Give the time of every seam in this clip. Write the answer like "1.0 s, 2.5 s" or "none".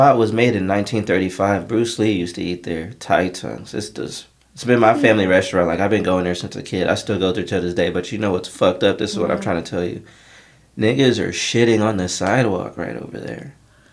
none